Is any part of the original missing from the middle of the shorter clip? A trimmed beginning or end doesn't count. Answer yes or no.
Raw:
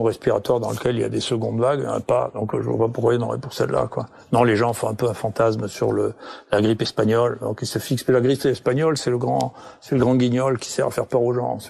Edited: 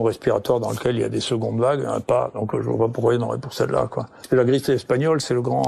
yes